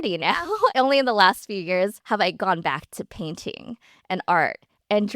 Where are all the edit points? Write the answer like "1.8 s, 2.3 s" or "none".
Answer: 0.7 s, 2.0 s

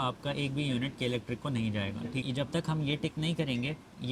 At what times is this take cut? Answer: 2.2 s

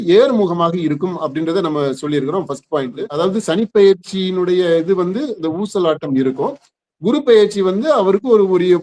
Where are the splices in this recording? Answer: 3.0 s

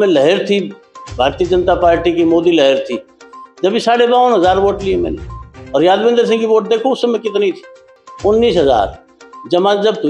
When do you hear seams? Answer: none

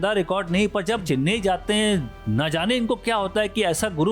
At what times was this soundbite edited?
1.0 s

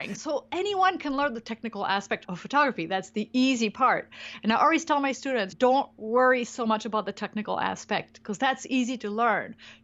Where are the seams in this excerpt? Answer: 2.3 s

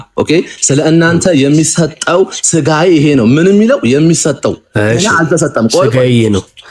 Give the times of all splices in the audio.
none

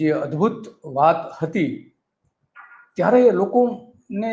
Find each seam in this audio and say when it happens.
none

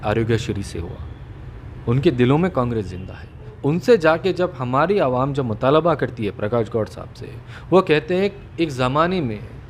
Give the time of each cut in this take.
3.5 s

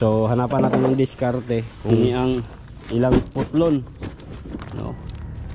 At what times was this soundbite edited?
1.9 s

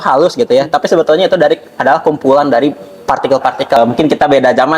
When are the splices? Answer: 3.8 s

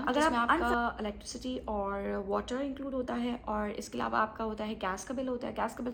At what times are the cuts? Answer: none

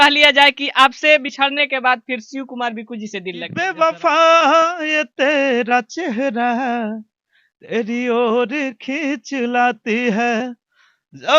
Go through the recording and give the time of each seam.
3.7 s

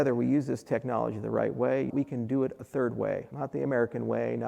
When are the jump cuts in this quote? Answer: 1.9 s, 3.3 s

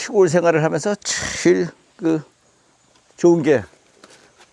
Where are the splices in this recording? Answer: none

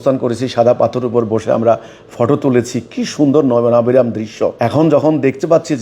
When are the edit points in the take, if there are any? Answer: 4.6 s

